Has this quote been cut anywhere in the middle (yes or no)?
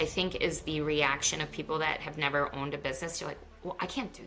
no